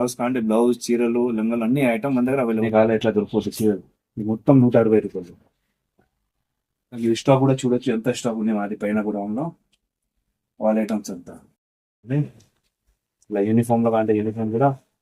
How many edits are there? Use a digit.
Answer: 3